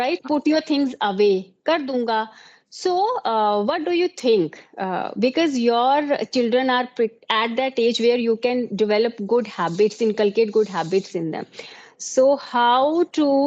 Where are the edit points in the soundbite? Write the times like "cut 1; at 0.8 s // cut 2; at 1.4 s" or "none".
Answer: none

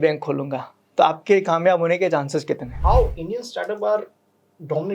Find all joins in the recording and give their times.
cut 1; at 2.7 s

